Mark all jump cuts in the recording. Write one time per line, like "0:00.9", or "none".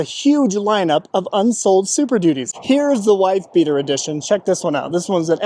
0:02.5